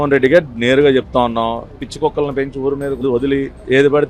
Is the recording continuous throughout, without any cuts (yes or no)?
no